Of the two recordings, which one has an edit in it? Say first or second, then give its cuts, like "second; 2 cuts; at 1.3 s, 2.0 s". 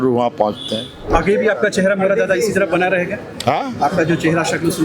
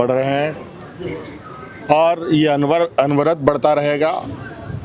first; 1 cut; at 1.1 s